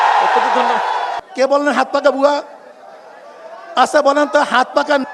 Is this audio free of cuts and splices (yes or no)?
no